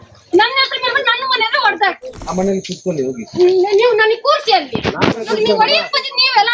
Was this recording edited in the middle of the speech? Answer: yes; 1 cut; at 2.2 s

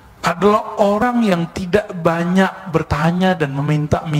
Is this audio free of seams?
yes; 0 cuts

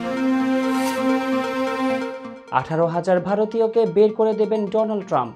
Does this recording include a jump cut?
yes; 1 cut; at 2.2 s

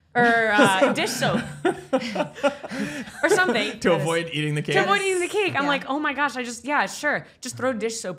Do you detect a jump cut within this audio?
no; 0 cuts

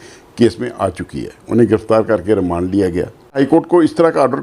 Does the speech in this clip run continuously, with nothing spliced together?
no; 1 cut; at 3.4 s

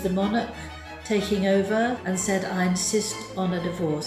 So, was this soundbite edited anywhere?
yes; 1 cut; at 2.0 s

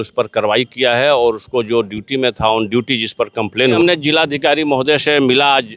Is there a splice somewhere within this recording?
yes; 1 cut; at 3.8 s

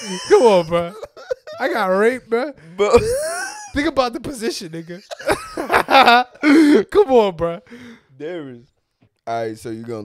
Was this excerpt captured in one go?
no; 2 cuts; at 3.7 s, 9.1 s

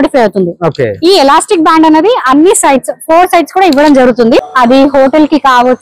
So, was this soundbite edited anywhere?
yes; 1 cut; at 4.5 s

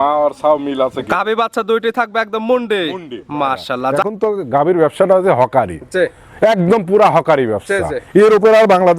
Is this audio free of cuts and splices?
no; 1 cut; at 4.0 s

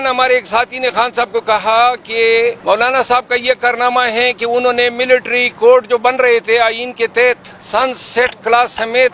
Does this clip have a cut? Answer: yes; 2 cuts; at 2.6 s, 7.5 s

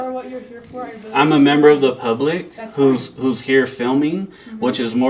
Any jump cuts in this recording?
no; 0 cuts

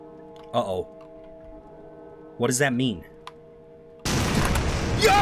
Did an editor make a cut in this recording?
no; 0 cuts

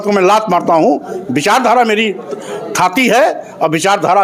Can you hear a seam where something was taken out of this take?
no; 0 cuts

